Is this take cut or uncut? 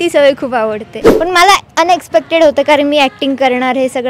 cut